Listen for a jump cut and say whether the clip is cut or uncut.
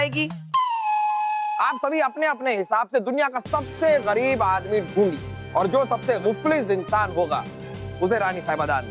cut